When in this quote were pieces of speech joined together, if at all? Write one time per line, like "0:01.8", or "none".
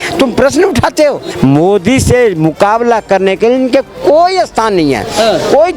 0:01.3